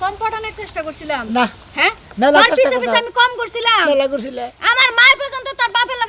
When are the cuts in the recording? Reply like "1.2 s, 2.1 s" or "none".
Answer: none